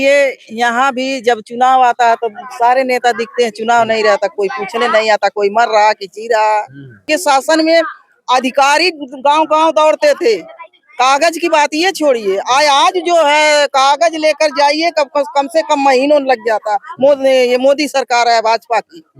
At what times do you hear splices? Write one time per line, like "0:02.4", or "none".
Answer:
0:07.0